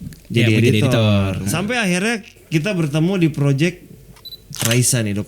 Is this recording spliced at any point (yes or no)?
yes